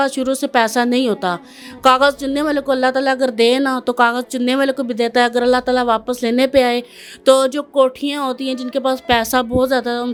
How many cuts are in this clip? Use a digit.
0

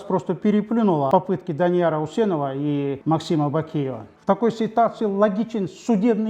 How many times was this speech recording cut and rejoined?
3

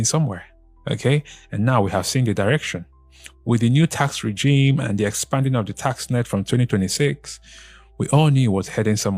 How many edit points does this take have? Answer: 0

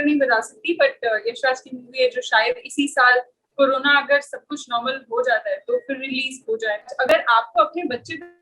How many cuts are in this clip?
1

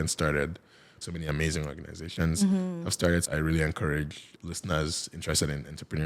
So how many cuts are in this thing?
2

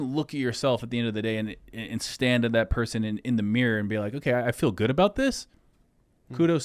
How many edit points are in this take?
0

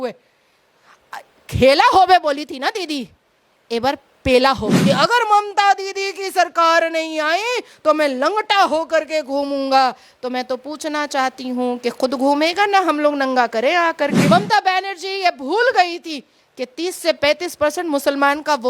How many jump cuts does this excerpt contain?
2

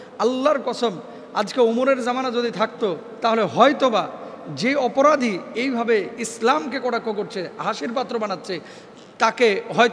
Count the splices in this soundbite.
0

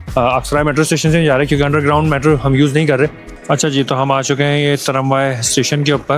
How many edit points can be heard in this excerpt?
1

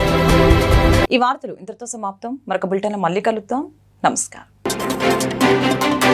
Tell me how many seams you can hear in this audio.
0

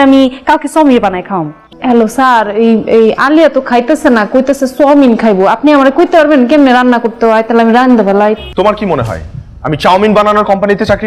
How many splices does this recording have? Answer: 2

